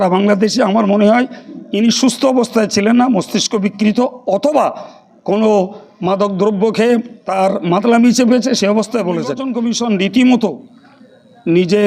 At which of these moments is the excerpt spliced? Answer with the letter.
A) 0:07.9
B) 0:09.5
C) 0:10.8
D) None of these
B